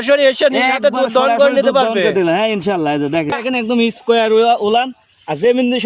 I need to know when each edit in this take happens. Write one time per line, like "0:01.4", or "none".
0:03.4